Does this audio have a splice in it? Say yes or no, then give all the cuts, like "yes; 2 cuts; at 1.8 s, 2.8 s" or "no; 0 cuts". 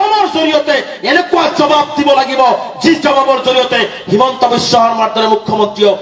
no; 0 cuts